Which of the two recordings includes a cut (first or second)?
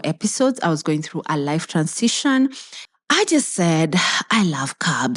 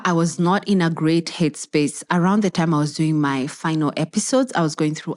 first